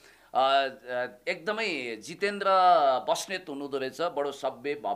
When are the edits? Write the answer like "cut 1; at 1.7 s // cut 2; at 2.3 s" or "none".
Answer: none

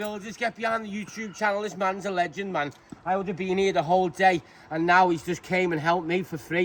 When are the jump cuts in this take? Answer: none

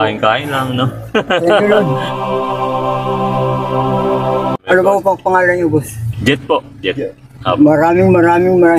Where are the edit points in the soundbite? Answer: none

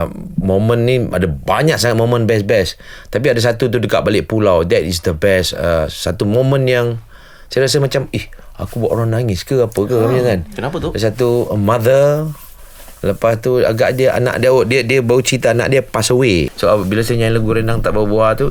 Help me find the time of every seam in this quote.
none

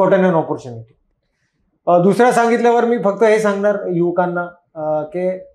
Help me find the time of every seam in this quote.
none

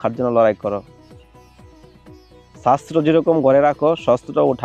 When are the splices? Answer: none

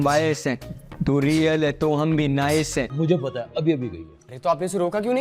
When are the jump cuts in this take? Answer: cut 1; at 2.9 s

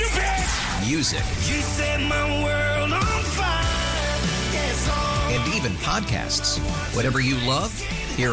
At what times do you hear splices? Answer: none

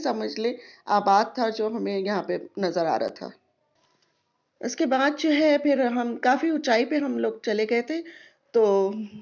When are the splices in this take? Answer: none

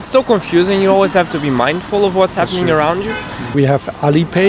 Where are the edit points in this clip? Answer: cut 1; at 3.5 s

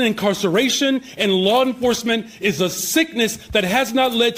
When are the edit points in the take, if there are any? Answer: none

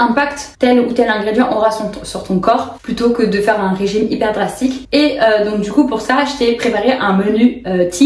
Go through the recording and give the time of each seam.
none

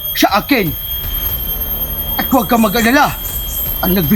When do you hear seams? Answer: none

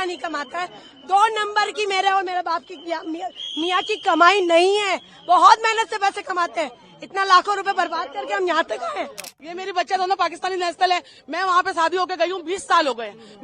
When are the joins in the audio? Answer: cut 1; at 9.4 s

